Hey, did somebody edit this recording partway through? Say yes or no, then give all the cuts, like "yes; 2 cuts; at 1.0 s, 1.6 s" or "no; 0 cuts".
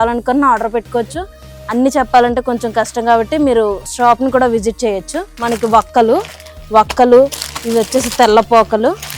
no; 0 cuts